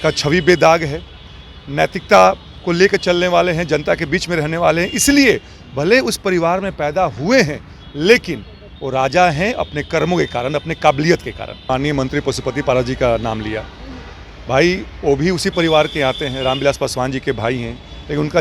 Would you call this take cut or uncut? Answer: cut